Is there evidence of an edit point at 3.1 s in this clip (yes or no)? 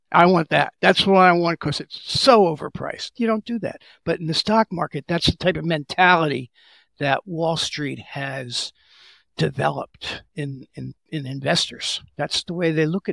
yes